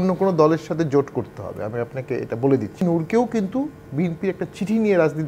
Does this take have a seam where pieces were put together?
yes; 1 cut; at 2.8 s

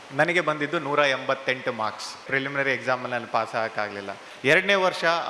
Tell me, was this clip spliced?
yes; 2 cuts; at 2.2 s, 4.2 s

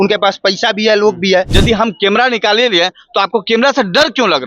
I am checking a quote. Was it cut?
yes; 1 cut; at 1.5 s

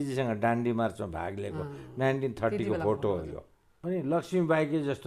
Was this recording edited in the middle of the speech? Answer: yes; 1 cut; at 3.8 s

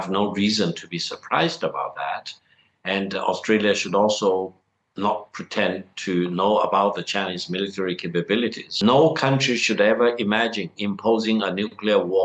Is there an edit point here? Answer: yes; 1 cut; at 8.7 s

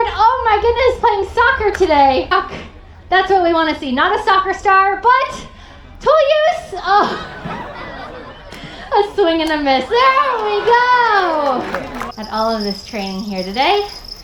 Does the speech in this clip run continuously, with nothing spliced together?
no; 2 cuts; at 2.3 s, 12.0 s

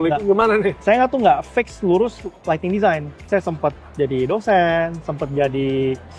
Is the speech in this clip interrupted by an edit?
no; 0 cuts

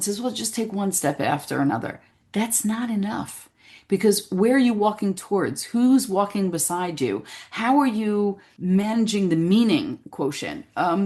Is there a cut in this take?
yes; 1 cut; at 8.5 s

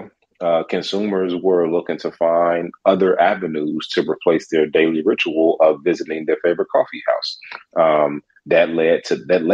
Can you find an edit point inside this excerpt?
no; 0 cuts

